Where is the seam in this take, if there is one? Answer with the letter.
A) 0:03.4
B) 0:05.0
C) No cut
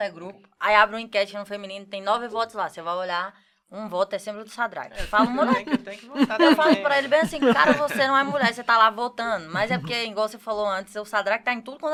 C